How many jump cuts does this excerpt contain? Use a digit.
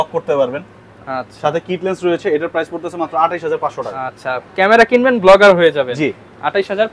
0